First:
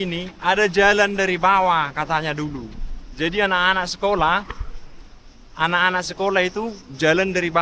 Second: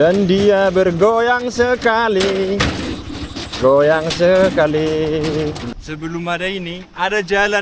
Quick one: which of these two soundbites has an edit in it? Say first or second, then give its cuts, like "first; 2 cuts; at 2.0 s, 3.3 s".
second; 1 cut; at 5.6 s